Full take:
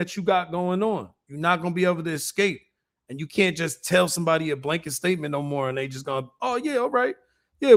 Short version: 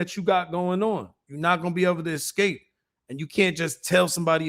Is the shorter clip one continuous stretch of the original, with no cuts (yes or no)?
yes